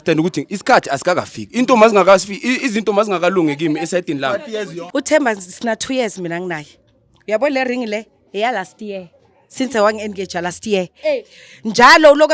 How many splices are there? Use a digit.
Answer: 1